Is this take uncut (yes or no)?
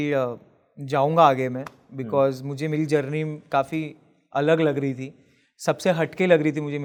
yes